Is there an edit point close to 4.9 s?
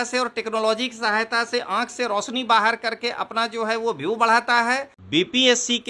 yes; 1 cut; at 4.9 s

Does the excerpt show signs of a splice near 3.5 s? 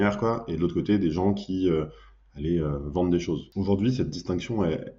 yes; 1 cut; at 3.5 s

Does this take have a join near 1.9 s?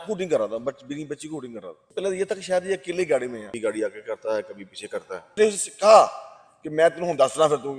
yes; 3 cuts; at 1.9 s, 3.5 s, 5.3 s

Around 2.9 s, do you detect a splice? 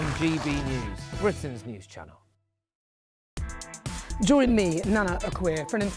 yes; 1 cut; at 2.9 s

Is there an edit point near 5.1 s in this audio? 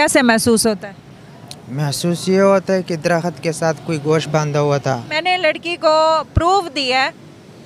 yes; 1 cut; at 5.1 s

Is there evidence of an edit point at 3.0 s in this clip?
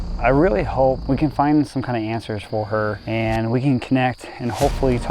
yes; 2 cuts; at 1.0 s, 3.0 s

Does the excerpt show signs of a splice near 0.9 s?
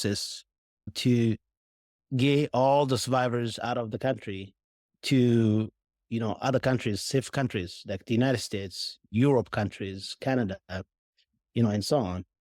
yes; 1 cut; at 0.9 s

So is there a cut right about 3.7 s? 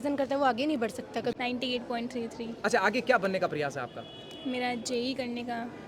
no; 1 cut; at 1.3 s

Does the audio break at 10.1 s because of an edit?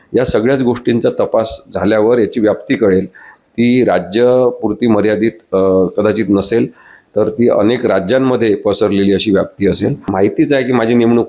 yes; 1 cut; at 10.1 s

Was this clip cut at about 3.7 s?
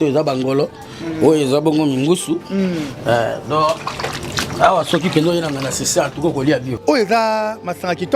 no; 1 cut; at 6.7 s

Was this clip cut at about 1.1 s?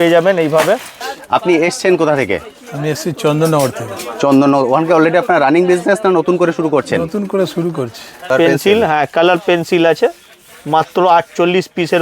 yes; 2 cuts; at 1.1 s, 8.1 s

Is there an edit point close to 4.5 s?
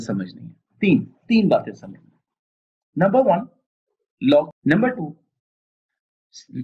yes; 1 cut; at 4.5 s

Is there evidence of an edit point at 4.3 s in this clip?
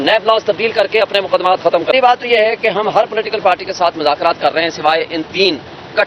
no; 1 cut; at 1.9 s

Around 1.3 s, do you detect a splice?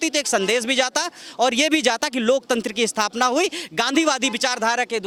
no; 0 cuts

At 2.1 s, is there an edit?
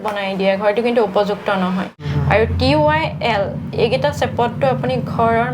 yes; 1 cut; at 2.1 s

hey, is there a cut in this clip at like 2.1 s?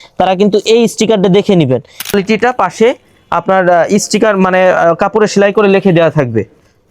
yes; 1 cut; at 2.1 s

